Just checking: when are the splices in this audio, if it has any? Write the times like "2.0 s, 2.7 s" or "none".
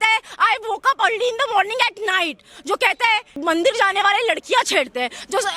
3.3 s